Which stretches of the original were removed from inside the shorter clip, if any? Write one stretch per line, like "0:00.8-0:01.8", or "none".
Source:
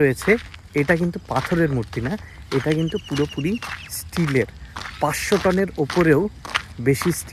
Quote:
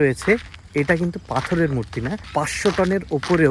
0:02.2-0:04.9